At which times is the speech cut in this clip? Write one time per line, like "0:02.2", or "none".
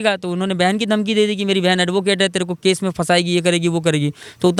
none